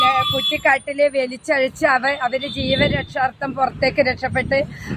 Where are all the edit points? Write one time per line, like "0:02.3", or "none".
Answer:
none